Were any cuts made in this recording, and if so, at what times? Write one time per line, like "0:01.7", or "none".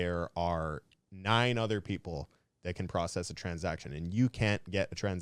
none